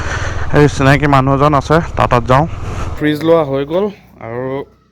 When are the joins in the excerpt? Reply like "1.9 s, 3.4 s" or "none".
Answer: 2.9 s